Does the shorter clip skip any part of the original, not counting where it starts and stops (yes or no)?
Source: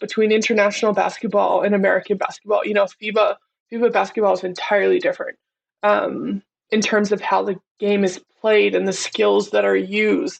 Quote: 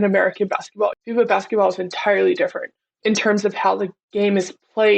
yes